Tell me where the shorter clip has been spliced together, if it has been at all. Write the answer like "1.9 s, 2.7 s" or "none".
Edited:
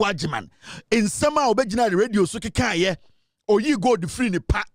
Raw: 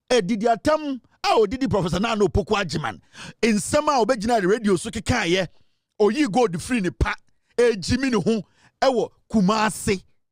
none